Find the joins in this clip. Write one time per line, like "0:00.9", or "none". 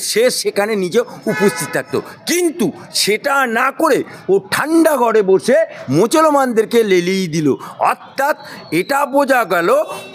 none